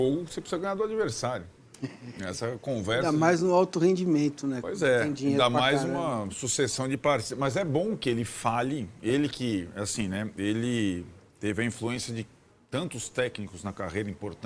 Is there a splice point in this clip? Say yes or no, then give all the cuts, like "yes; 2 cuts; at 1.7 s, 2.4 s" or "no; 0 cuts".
no; 0 cuts